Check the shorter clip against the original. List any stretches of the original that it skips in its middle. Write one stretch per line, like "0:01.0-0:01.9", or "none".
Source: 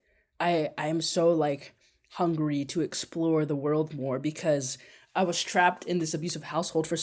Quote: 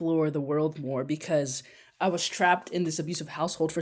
none